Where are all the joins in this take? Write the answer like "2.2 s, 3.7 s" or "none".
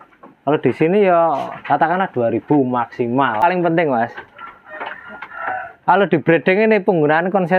3.4 s